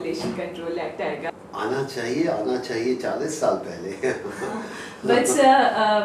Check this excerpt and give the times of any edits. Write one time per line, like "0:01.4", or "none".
0:01.3